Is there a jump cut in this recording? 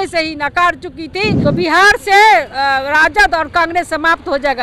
yes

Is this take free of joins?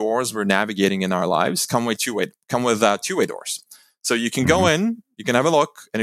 yes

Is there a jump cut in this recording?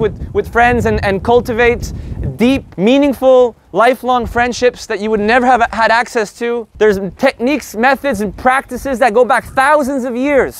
yes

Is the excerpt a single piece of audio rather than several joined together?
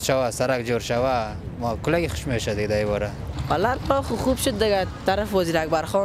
no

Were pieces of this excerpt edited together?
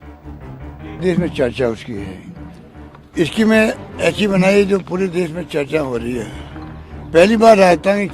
yes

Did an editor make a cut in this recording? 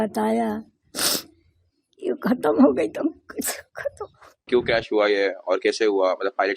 yes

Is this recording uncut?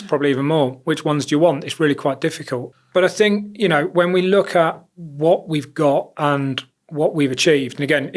yes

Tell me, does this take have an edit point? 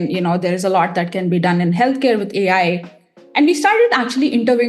no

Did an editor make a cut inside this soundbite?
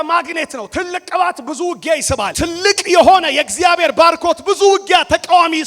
yes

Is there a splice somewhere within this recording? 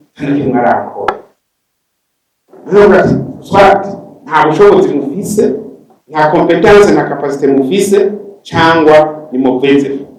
no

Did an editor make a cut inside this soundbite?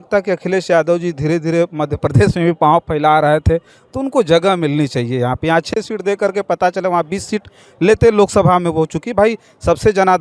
no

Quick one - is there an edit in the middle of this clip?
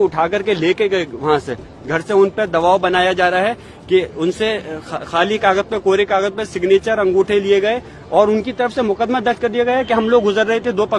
no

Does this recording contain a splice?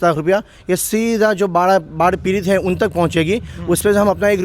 no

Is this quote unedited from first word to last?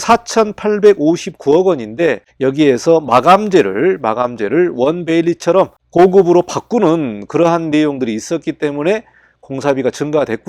yes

